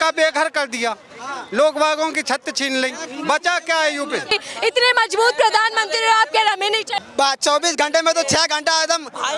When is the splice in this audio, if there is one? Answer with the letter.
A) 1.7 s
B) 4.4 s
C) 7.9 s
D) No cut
B